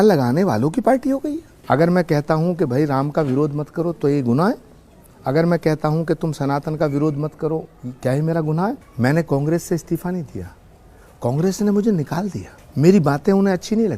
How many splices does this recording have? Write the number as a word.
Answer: two